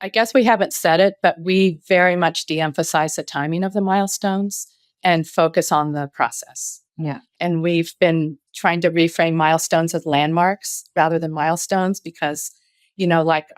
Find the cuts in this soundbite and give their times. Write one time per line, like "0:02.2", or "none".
0:07.2
0:08.4